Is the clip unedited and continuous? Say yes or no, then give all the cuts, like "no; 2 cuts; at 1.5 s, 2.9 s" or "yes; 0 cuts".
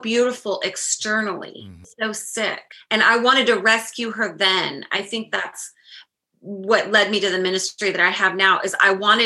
no; 2 cuts; at 1.9 s, 2.7 s